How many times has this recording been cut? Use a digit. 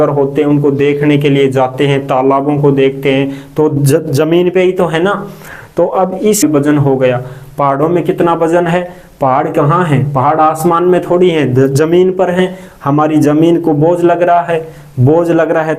1